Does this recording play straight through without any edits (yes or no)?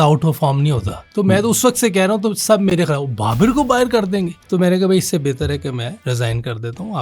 no